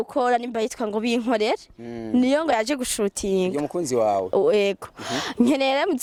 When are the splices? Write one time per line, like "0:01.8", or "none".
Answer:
none